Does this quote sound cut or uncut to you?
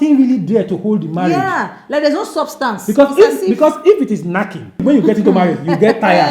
cut